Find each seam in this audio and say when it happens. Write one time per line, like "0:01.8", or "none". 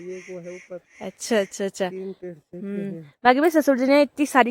none

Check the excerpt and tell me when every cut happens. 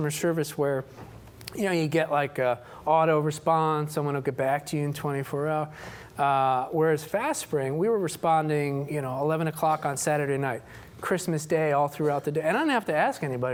none

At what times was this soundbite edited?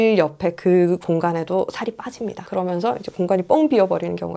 0:02.4

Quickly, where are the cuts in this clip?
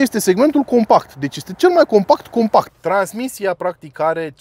0:02.7

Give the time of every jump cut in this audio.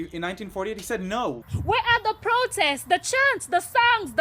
0:01.5

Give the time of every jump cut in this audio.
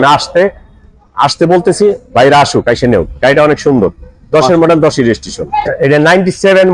0:05.7

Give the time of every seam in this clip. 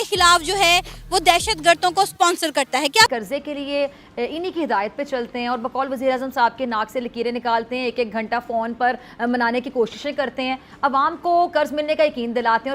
0:03.1

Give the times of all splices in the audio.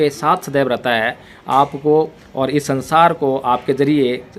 none

